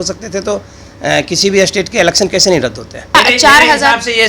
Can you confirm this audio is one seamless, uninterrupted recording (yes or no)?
no